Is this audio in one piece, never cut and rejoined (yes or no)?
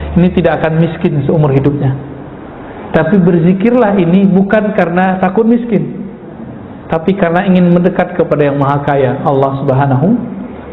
yes